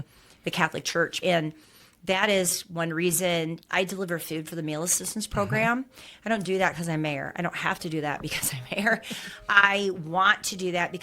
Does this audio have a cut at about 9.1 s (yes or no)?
no